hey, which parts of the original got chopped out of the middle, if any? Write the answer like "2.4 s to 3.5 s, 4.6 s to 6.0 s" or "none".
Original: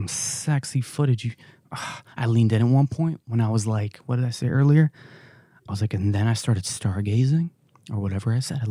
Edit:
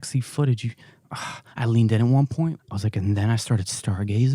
3.2 s to 5.6 s